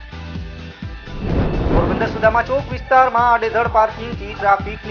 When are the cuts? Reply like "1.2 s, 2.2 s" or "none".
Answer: 1.0 s

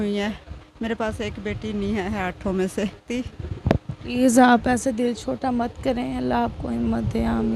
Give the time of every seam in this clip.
3.0 s

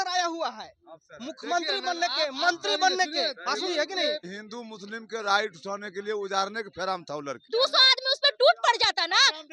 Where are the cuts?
4.4 s, 7.4 s

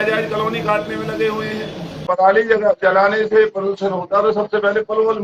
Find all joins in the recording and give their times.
2.0 s

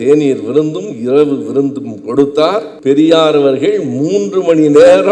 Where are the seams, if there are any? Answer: 2.7 s

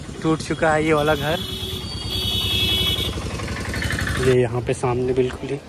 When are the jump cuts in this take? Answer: 4.2 s

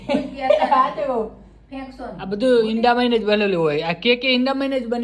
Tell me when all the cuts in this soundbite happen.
2.1 s

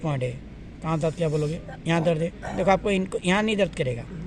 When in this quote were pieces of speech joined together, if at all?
none

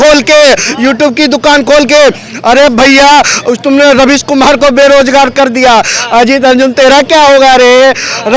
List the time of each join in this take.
none

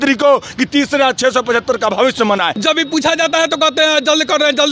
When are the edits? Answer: 2.5 s

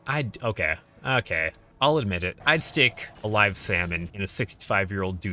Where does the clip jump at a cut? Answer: 1.6 s, 2.4 s, 3.1 s, 4.1 s

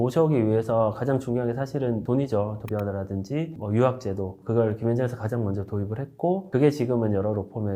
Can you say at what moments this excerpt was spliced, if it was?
2.6 s

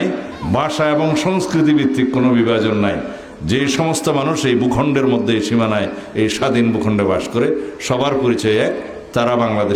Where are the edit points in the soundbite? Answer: none

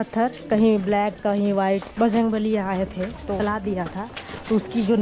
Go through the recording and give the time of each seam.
1.9 s, 3.4 s

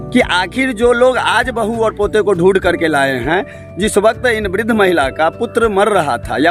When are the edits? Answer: none

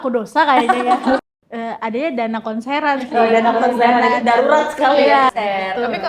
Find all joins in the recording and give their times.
1.2 s, 5.3 s

